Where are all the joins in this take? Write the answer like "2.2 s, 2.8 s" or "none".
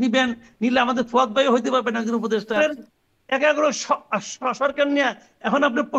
2.6 s